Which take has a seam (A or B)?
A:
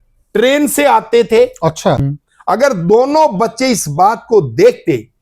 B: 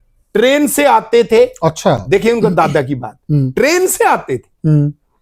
A